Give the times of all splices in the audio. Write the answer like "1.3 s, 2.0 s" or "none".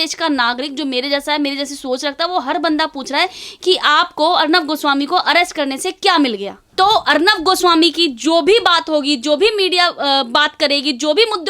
6.6 s